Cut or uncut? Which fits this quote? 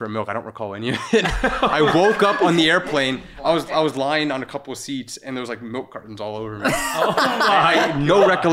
uncut